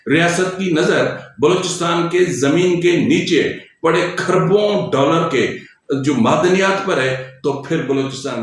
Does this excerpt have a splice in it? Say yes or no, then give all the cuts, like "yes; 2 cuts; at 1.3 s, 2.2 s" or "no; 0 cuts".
no; 0 cuts